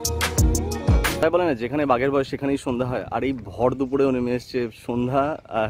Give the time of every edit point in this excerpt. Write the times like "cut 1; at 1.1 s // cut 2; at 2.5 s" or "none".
cut 1; at 1.2 s